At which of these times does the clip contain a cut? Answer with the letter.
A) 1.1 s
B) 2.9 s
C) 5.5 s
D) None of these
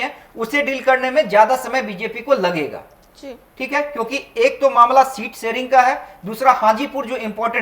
D